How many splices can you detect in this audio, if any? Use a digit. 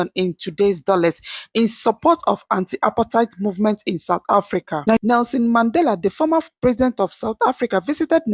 1